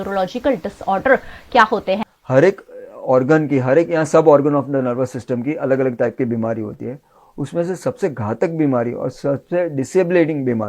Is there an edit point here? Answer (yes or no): yes